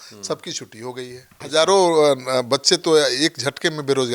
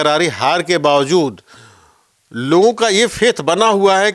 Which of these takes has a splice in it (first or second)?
first